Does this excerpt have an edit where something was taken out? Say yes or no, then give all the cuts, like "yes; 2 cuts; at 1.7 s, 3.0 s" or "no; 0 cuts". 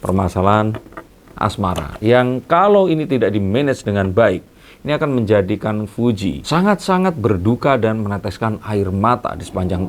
no; 0 cuts